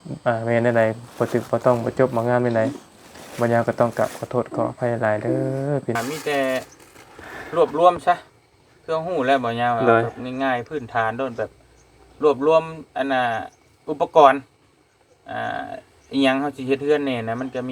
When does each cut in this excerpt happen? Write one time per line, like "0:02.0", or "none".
0:06.0

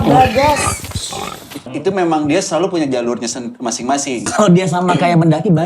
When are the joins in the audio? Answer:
0:01.7
0:04.3

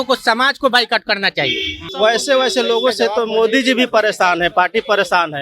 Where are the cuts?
0:01.8

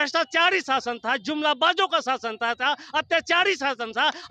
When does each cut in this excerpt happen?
none

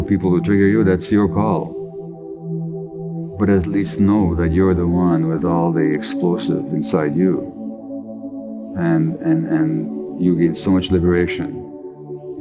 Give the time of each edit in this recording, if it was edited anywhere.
0:01.7
0:03.3

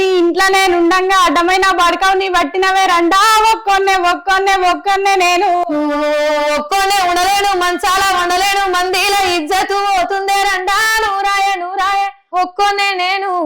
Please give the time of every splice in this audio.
0:12.2

